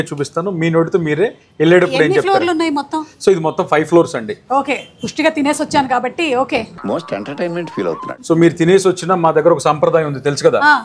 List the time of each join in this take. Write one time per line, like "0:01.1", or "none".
none